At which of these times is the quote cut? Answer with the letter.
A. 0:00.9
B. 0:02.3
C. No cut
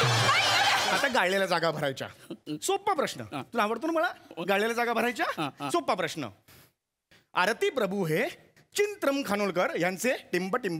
A